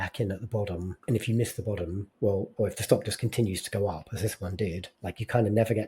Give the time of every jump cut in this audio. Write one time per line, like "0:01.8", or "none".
0:00.9
0:02.0
0:04.9